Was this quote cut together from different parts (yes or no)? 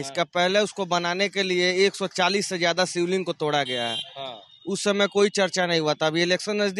no